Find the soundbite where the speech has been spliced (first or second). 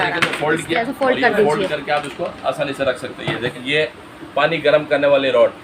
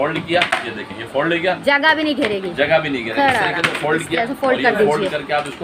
first